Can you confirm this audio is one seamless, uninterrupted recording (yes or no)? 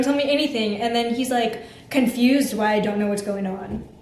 yes